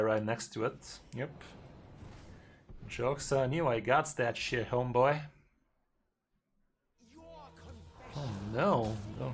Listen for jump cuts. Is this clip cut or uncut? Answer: cut